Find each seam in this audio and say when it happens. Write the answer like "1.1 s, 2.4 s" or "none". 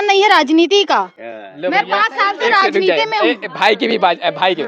none